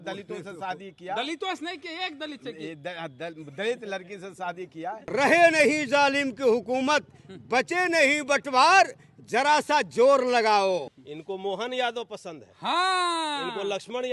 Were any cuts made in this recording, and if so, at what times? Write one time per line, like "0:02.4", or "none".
0:05.0
0:10.9